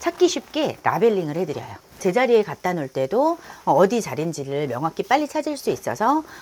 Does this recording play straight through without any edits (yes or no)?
yes